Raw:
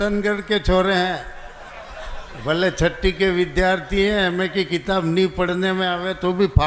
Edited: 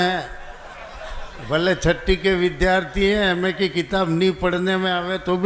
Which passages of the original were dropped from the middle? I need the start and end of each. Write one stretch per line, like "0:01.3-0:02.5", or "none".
none

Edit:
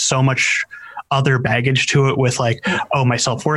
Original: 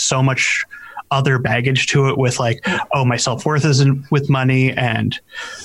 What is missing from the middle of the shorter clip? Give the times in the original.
none

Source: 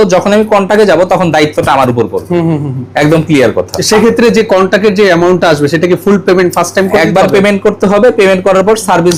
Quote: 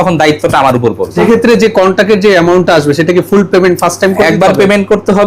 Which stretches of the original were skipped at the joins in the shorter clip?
0:02.3-0:03.9

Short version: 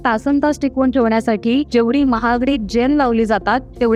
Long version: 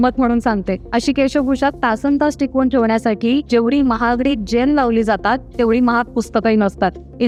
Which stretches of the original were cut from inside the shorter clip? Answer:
none

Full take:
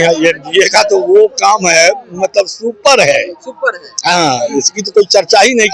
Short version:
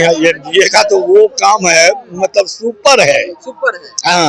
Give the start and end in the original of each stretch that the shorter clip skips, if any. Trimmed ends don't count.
none

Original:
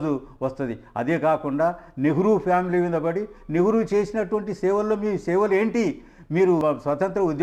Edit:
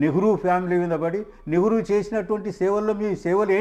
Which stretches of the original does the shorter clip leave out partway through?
none

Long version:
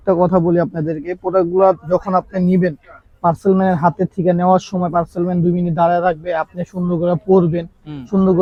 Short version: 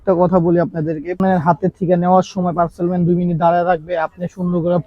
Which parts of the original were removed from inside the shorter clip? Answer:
0:01.2-0:03.6

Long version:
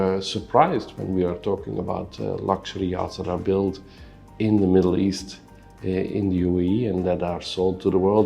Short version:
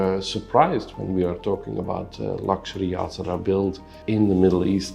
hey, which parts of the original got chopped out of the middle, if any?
0:03.9-0:04.2

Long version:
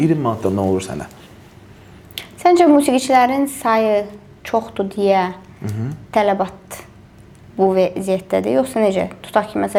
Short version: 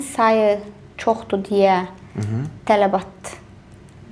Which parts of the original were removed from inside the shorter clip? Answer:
none

